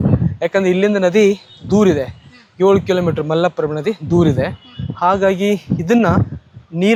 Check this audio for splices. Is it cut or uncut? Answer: uncut